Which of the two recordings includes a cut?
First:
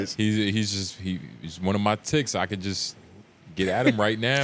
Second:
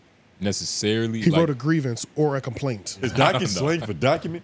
second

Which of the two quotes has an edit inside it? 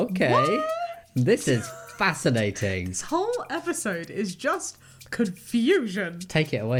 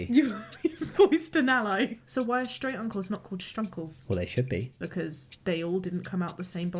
second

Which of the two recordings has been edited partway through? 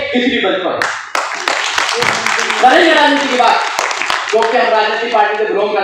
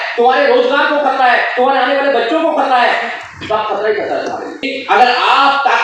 second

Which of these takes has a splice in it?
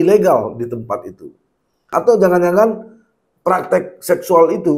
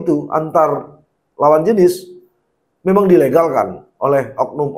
first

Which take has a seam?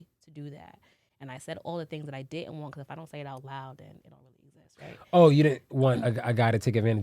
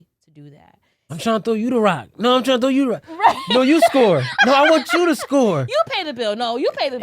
second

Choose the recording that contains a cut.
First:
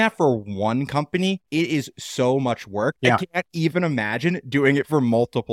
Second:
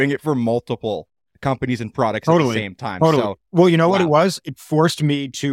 first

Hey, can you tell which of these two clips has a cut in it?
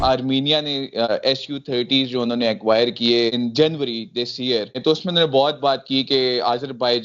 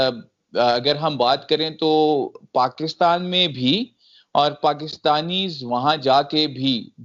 first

